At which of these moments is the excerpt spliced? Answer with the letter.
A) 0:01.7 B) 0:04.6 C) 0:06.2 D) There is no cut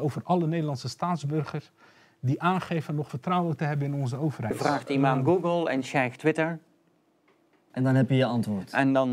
B